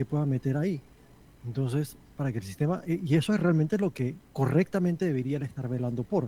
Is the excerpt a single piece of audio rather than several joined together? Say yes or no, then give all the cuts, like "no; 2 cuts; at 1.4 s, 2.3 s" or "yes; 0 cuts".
yes; 0 cuts